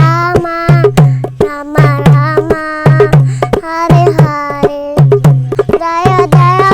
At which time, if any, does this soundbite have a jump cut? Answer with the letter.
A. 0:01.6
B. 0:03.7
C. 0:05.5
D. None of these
C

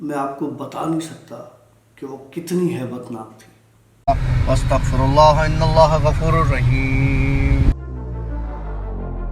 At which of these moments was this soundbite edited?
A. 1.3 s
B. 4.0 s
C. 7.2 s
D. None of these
B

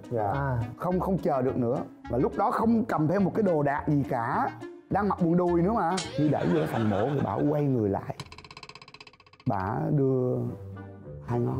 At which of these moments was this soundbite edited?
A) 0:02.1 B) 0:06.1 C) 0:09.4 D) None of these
B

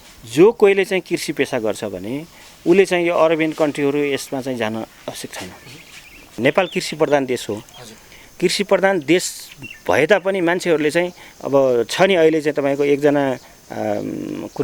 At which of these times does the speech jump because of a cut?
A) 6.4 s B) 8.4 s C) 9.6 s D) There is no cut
A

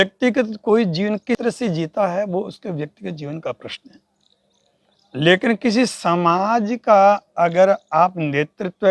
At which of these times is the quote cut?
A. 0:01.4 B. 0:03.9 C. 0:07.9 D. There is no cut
A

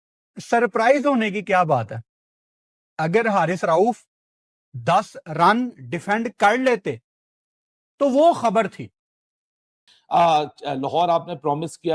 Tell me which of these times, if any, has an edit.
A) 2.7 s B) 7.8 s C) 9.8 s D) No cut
C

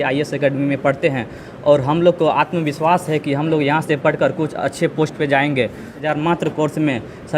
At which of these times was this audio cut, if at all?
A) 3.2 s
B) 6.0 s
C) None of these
B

